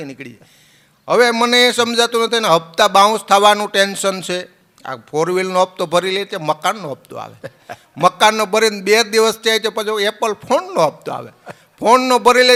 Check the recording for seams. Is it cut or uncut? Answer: uncut